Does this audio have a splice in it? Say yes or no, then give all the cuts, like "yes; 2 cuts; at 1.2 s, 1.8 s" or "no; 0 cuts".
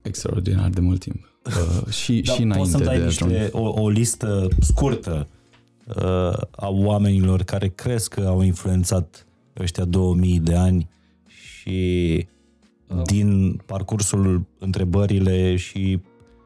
no; 0 cuts